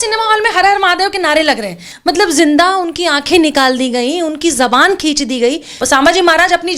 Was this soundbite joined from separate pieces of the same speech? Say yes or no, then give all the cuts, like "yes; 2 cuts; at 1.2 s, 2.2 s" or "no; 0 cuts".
yes; 2 cuts; at 1.9 s, 5.7 s